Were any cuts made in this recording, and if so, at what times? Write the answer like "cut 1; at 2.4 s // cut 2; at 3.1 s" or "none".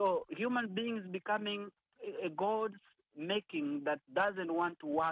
cut 1; at 1.9 s

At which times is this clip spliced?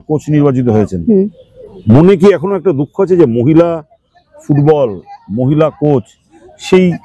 none

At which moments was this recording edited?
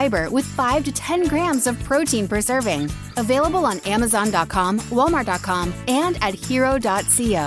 none

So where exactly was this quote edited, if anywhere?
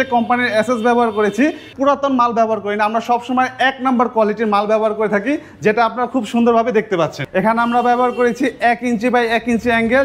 cut 1; at 1.7 s // cut 2; at 7.2 s

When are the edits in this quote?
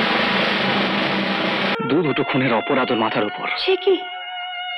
cut 1; at 1.8 s

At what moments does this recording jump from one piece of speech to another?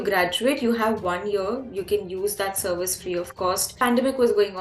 cut 1; at 3.7 s

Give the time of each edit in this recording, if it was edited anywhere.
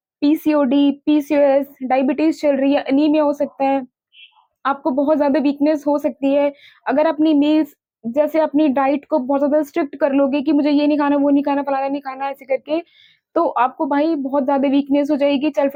none

